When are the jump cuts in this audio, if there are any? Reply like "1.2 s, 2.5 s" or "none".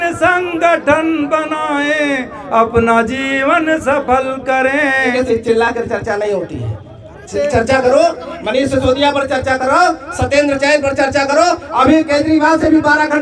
5.1 s